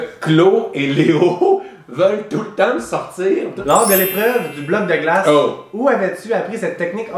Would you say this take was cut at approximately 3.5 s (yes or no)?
yes